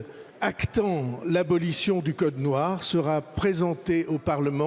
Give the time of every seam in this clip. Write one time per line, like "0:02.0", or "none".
none